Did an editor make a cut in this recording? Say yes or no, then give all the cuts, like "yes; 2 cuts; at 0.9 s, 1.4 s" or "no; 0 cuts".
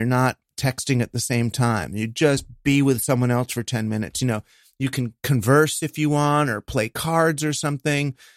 no; 0 cuts